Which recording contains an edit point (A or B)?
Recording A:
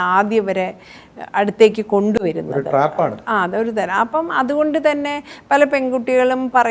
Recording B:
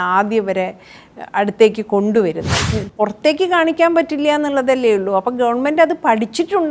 B